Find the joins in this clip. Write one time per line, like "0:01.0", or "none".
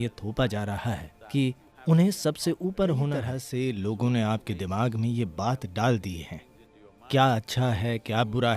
0:01.7
0:03.4